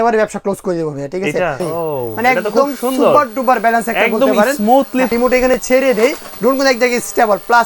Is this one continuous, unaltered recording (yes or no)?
no